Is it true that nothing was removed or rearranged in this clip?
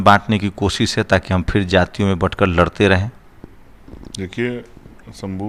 yes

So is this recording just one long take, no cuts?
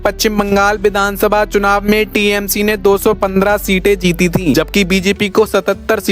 no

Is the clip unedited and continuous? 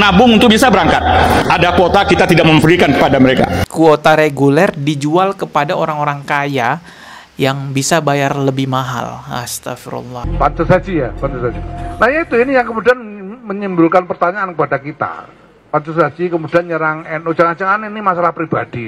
no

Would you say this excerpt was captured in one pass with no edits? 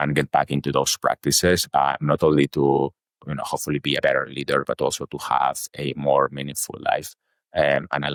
yes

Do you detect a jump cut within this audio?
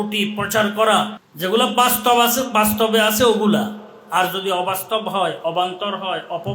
yes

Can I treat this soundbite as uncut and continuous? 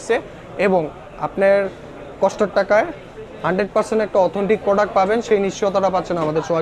yes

